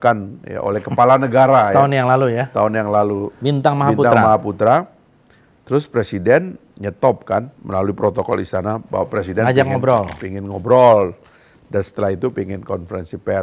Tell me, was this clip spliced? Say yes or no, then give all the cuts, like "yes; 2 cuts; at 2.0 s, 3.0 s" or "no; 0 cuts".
yes; 2 cuts; at 3.3 s, 7.6 s